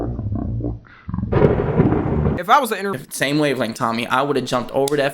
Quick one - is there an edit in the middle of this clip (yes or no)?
yes